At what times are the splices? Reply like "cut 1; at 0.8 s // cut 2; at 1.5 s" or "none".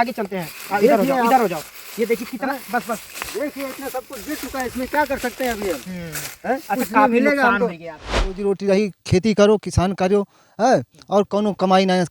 cut 1; at 8.4 s